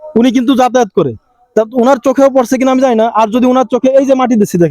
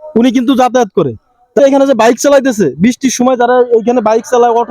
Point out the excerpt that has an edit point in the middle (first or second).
second